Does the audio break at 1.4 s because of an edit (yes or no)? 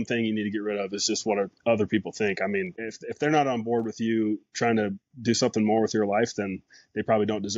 no